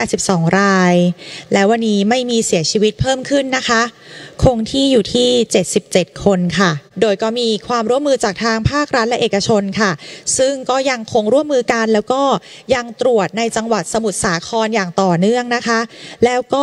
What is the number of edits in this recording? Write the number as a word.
zero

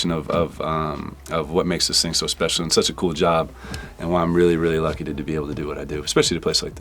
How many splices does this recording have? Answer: zero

